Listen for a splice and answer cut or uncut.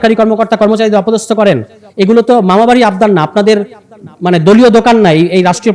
uncut